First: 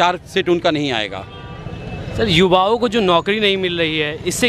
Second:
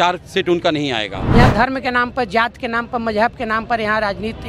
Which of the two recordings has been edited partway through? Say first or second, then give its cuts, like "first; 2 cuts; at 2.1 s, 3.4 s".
second; 1 cut; at 1.2 s